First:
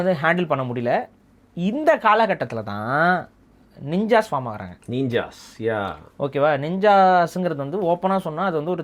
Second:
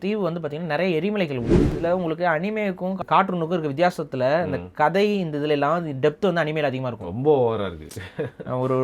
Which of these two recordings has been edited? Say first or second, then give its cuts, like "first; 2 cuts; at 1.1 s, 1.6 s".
second; 2 cuts; at 1.8 s, 3.0 s